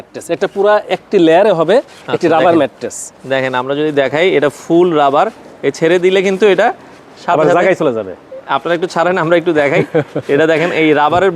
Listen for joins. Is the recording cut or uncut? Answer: uncut